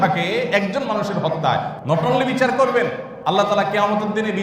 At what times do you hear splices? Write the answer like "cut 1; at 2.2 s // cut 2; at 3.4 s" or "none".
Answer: cut 1; at 1.7 s // cut 2; at 3.1 s